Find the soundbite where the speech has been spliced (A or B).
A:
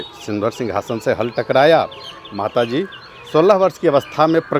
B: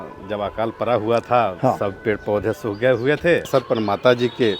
B